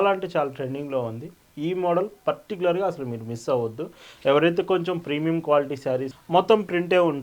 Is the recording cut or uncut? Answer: cut